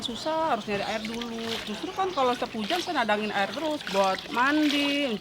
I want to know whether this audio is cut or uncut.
cut